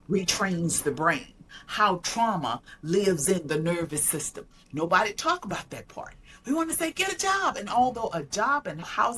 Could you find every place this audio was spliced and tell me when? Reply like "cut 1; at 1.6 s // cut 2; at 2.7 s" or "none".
none